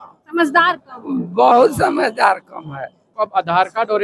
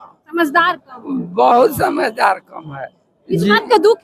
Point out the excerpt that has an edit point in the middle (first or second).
first